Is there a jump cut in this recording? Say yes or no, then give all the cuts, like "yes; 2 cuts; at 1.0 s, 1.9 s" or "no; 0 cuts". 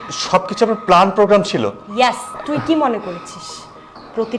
yes; 1 cut; at 2.3 s